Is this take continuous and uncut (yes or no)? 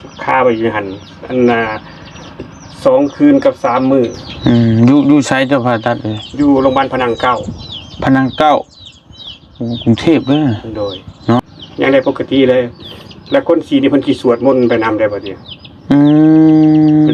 no